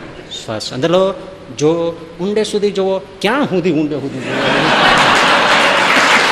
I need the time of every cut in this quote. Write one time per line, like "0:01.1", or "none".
none